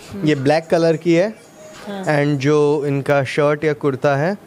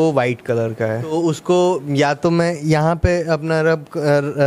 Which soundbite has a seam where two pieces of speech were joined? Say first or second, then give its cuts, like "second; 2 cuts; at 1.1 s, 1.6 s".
second; 1 cut; at 1.1 s